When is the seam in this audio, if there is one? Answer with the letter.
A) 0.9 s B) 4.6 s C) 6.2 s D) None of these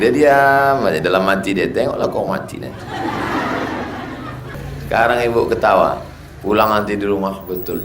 B